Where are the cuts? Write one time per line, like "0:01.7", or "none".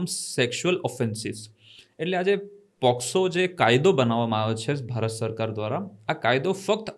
none